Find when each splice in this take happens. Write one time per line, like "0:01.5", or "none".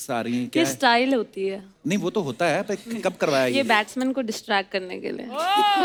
none